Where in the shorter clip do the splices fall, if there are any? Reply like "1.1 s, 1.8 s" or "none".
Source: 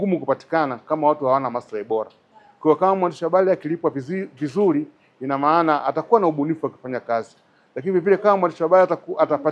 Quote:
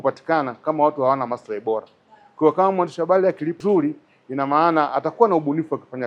3.6 s